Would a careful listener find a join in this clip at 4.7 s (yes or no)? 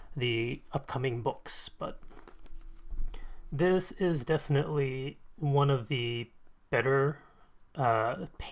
yes